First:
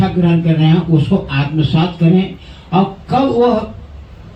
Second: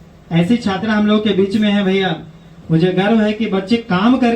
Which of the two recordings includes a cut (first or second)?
second